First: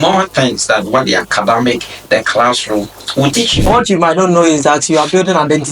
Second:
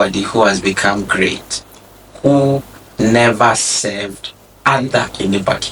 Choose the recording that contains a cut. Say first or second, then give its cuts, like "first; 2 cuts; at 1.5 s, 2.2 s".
first; 1 cut; at 3.7 s